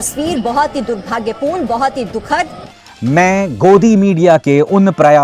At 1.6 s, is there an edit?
no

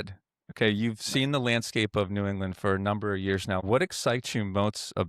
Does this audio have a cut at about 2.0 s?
no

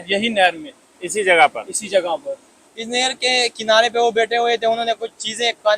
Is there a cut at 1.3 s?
no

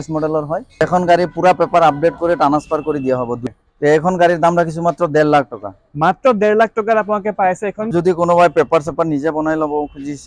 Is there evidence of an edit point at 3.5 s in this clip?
yes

